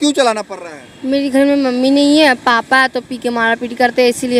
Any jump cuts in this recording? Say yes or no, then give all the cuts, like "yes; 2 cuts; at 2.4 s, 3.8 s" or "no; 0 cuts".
no; 0 cuts